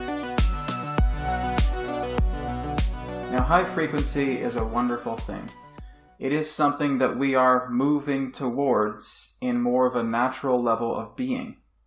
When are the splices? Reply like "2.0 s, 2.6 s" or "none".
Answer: 6.2 s